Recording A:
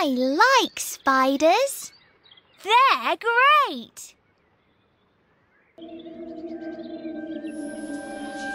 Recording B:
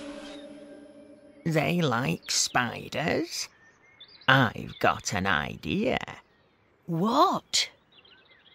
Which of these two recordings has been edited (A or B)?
A